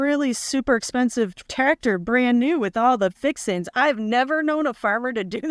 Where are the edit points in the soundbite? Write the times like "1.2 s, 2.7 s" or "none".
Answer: none